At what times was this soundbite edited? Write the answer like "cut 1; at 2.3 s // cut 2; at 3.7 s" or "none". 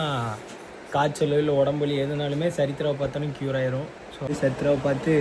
cut 1; at 4.3 s